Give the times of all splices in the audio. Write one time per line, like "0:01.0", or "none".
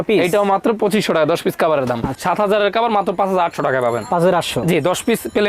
0:02.1